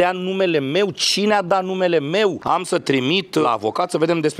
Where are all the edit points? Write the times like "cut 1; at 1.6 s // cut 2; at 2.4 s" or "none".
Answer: cut 1; at 2.4 s // cut 2; at 3.4 s

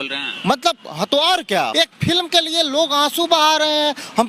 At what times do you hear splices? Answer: cut 1; at 1.7 s

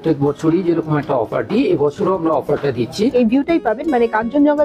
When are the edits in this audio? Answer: cut 1; at 3.1 s

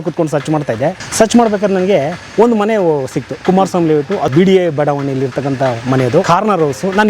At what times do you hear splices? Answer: cut 1; at 1.0 s // cut 2; at 4.3 s // cut 3; at 6.2 s

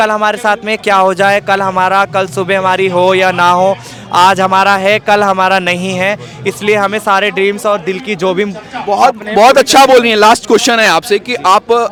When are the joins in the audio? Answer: none

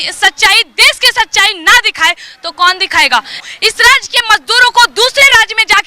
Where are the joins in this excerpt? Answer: cut 1; at 3.4 s

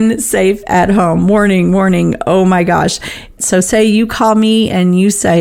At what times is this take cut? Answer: cut 1; at 3.4 s

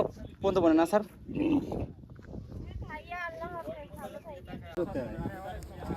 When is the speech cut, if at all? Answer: cut 1; at 4.8 s

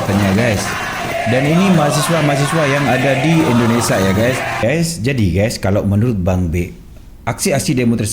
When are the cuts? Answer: cut 1; at 4.6 s

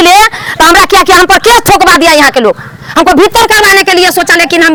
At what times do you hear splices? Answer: none

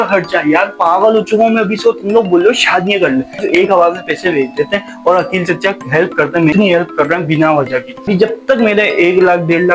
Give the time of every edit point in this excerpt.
cut 1; at 3.4 s // cut 2; at 6.5 s // cut 3; at 8.0 s

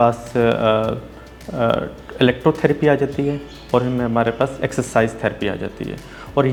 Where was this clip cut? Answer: none

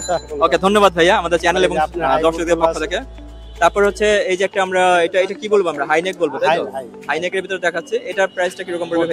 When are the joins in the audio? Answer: none

